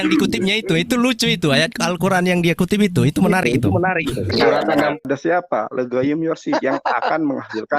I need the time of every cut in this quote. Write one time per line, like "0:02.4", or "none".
0:05.0